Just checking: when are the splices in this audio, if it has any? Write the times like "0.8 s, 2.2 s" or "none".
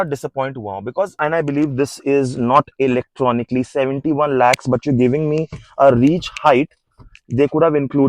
1.1 s

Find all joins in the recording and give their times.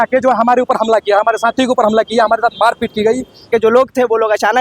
3.5 s

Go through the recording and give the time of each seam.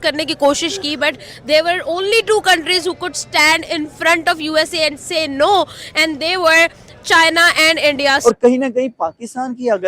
8.2 s

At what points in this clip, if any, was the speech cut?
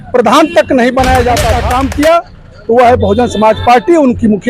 1.6 s

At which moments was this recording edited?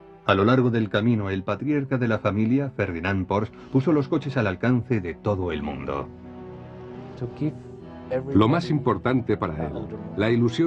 7.2 s

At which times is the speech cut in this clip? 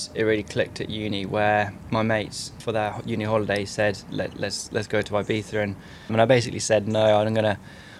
2.2 s, 6.1 s

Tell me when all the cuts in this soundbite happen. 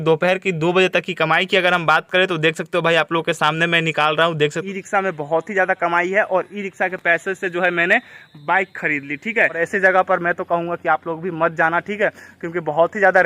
4.6 s, 9.6 s

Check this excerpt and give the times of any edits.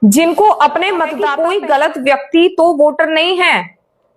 1.2 s

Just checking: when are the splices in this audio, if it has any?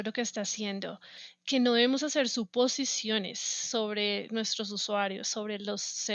1.1 s

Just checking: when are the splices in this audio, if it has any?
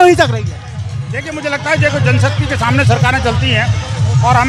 none

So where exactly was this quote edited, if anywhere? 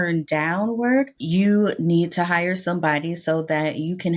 1.2 s

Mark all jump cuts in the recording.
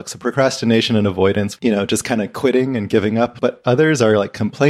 1.5 s, 3.3 s

